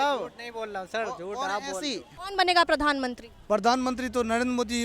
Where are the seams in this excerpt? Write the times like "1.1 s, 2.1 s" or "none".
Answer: 2.1 s